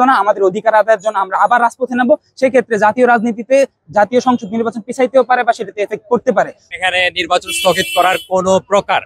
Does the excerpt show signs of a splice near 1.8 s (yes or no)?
no